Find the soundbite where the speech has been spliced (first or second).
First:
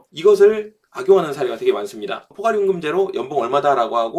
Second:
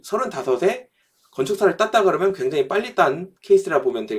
first